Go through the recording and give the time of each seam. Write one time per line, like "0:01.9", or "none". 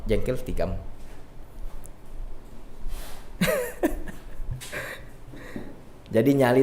none